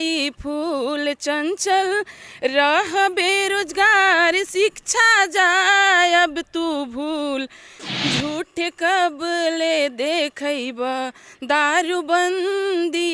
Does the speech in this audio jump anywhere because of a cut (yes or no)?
yes